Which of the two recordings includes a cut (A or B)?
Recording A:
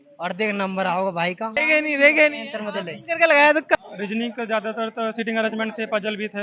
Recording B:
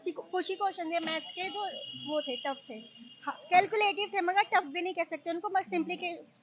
A